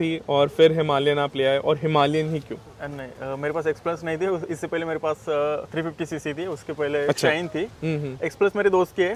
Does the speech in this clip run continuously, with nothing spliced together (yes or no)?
yes